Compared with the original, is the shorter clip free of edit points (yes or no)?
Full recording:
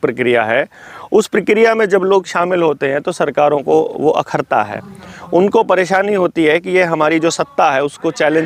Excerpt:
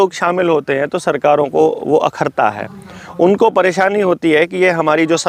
yes